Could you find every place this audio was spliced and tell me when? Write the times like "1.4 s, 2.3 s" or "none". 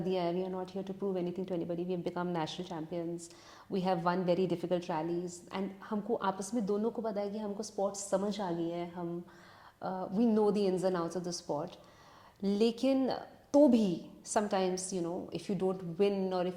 none